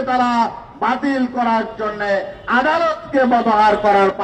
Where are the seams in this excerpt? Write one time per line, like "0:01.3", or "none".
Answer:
none